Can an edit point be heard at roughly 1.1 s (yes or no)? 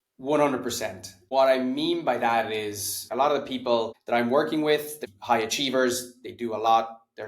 yes